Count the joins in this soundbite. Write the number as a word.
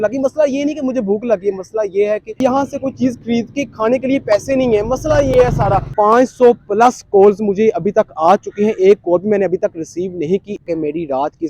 two